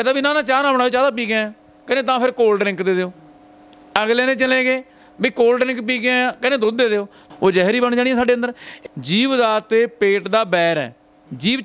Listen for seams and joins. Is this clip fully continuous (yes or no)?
no